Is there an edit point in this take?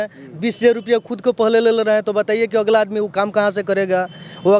no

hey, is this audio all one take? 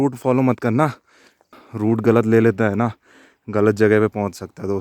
no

